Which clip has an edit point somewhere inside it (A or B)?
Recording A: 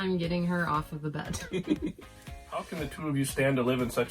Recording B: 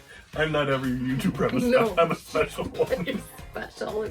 A